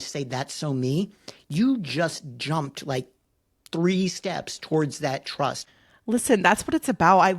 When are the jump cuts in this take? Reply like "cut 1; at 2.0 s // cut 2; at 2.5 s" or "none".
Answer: cut 1; at 5.6 s